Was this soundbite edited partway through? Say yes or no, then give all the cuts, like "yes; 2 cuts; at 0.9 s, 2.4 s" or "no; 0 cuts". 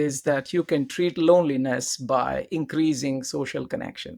no; 0 cuts